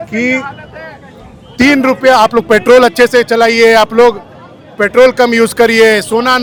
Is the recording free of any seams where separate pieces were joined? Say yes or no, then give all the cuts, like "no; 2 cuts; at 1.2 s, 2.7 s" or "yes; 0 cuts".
yes; 0 cuts